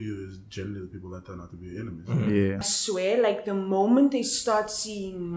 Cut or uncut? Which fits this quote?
cut